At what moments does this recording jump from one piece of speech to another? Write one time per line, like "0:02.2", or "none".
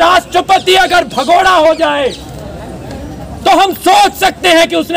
none

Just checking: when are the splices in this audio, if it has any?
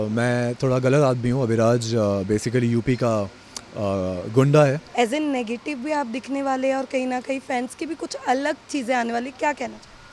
0:04.8

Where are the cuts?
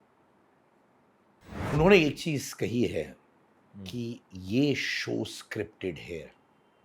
0:01.7

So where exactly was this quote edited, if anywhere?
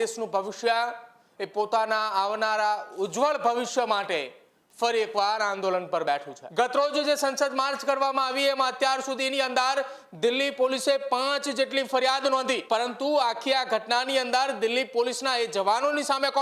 0:06.4
0:12.6

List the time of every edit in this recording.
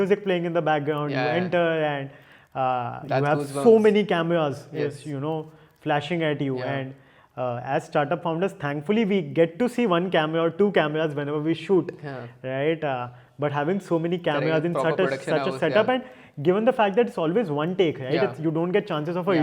none

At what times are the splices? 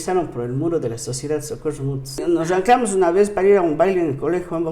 0:02.2

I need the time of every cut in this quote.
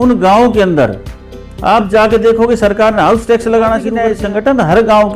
0:04.0

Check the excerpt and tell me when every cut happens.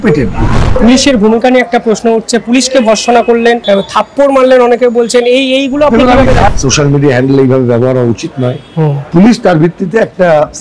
0:00.8
0:03.6
0:06.5
0:09.0

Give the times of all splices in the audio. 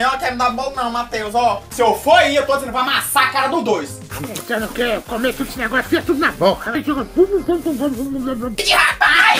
0:04.0
0:06.8
0:08.5

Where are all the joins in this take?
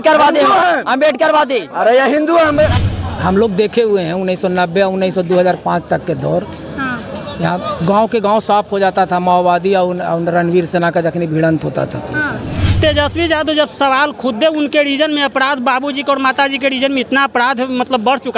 0:02.8
0:12.8

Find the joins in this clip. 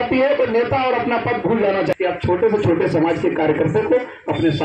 0:01.9

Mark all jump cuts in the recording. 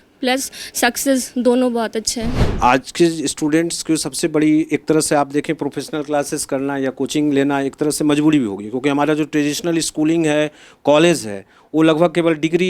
0:02.5

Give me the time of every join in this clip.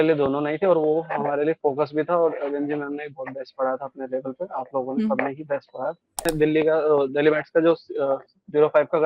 0:06.3

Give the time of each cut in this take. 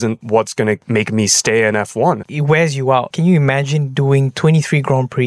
0:02.3
0:03.1

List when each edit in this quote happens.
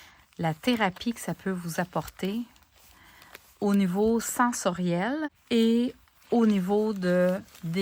0:05.4

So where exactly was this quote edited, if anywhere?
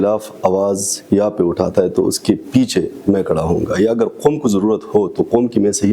none

